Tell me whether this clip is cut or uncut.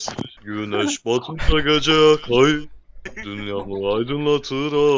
uncut